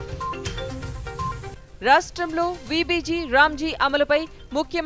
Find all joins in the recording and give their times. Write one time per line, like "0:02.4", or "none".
0:01.5